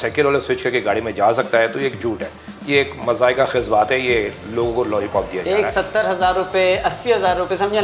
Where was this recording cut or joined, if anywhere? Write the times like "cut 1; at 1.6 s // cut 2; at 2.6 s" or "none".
none